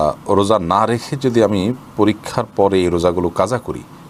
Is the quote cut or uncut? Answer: uncut